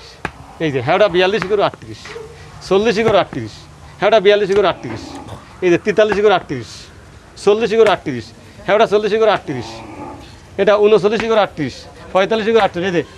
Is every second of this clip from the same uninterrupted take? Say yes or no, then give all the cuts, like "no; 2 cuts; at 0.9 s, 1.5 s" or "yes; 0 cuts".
yes; 0 cuts